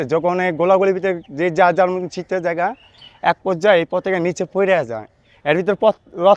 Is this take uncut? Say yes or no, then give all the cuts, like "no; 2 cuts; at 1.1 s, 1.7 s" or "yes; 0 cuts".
yes; 0 cuts